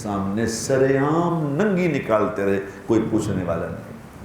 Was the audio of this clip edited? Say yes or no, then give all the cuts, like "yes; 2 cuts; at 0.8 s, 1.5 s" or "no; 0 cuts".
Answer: no; 0 cuts